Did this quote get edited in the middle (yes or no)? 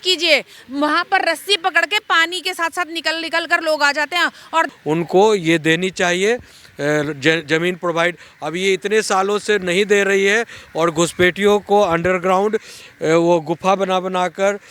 yes